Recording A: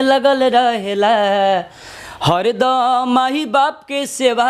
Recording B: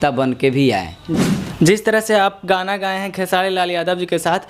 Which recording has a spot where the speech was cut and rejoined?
B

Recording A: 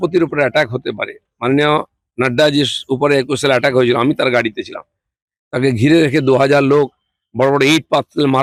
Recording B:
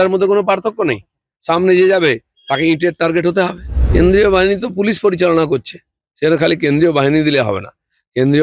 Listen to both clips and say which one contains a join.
B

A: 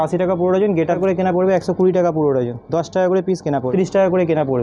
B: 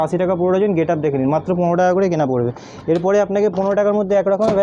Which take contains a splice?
A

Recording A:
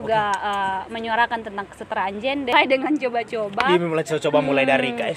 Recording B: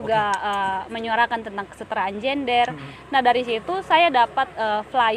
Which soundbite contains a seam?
A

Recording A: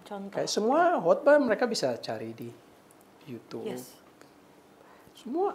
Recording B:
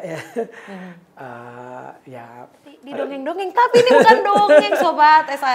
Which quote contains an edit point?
B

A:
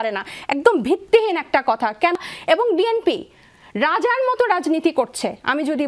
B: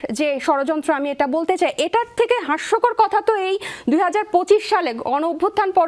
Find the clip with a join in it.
A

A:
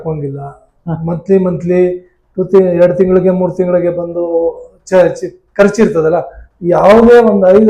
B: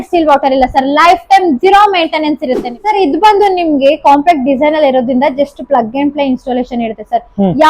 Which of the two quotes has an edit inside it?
B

